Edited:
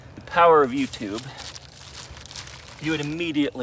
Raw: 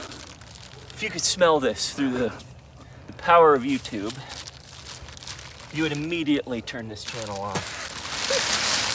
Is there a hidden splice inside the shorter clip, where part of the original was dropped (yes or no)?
no